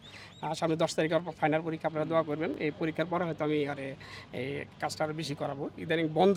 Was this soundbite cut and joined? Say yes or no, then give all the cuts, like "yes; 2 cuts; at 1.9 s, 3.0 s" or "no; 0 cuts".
no; 0 cuts